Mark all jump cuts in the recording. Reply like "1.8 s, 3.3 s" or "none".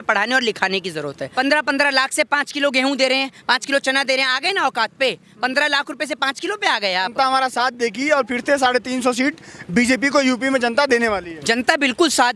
1.2 s, 7.1 s